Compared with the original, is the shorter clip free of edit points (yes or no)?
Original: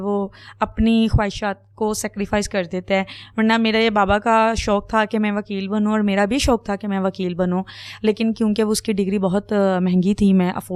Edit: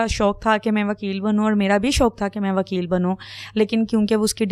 yes